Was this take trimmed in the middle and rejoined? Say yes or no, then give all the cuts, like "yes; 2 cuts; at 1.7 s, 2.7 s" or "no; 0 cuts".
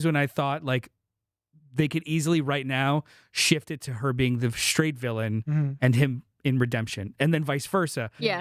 no; 0 cuts